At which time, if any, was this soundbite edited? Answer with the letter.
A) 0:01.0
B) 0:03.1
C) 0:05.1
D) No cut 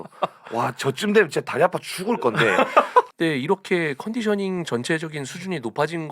B